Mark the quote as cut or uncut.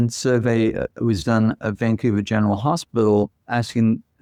uncut